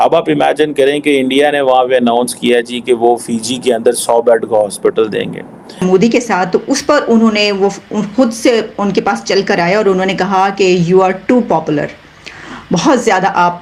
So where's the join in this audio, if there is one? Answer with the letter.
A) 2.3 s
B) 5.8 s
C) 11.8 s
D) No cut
B